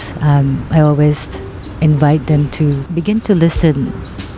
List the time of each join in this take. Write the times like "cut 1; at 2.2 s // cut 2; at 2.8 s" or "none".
cut 1; at 2.8 s